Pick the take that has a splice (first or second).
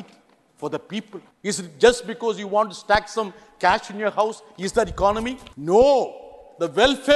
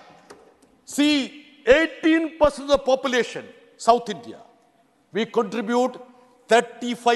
first